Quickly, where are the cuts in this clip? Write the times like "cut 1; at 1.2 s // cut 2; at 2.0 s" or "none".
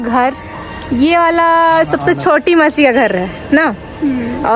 none